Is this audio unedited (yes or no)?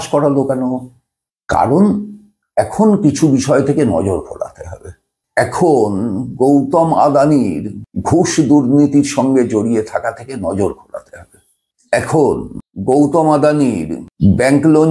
yes